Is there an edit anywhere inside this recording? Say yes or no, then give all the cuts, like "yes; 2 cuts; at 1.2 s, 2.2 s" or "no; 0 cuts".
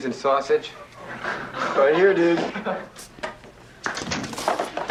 no; 0 cuts